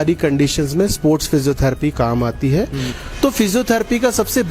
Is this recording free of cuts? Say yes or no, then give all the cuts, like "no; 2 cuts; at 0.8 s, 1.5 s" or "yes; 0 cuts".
no; 1 cut; at 2.9 s